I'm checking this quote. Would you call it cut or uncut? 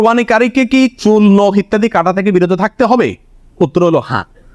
uncut